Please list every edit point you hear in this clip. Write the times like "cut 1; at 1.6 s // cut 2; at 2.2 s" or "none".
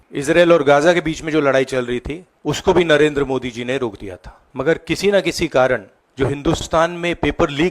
cut 1; at 6.6 s